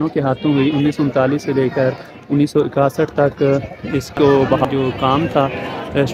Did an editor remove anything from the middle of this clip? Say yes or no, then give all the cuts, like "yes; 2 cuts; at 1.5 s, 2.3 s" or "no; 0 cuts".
yes; 1 cut; at 4.6 s